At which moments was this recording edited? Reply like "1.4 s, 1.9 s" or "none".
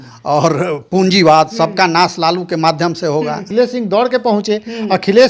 3.5 s